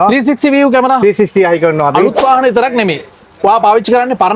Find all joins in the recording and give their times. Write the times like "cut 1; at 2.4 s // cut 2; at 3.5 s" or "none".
cut 1; at 2.1 s